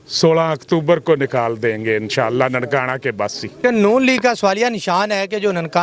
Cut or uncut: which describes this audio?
cut